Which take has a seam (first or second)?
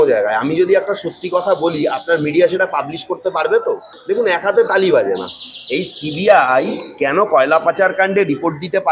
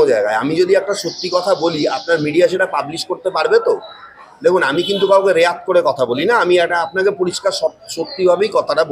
first